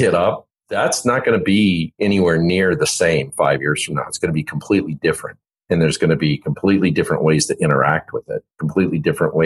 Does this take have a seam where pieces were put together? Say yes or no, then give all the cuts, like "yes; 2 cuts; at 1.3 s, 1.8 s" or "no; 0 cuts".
no; 0 cuts